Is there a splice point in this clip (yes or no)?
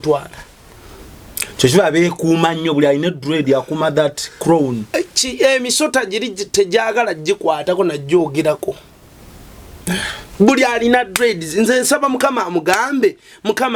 no